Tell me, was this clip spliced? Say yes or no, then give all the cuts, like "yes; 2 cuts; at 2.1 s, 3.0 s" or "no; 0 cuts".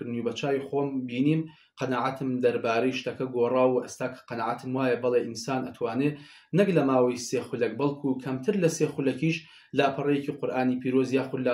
no; 0 cuts